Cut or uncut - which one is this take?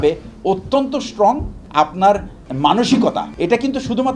cut